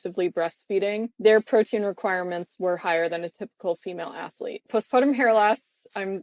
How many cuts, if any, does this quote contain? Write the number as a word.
two